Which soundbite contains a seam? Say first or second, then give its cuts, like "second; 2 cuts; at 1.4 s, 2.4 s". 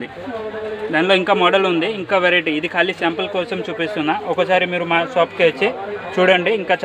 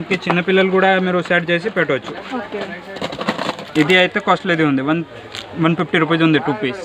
second; 1 cut; at 3.6 s